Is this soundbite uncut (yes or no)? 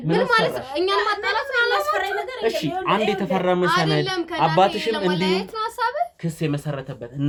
yes